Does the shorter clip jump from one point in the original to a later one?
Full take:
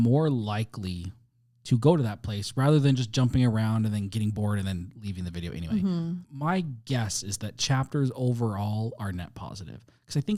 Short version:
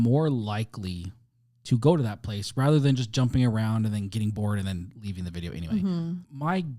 no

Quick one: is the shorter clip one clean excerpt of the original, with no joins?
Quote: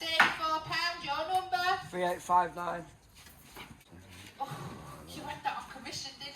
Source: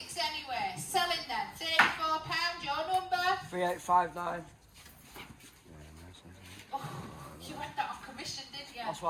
no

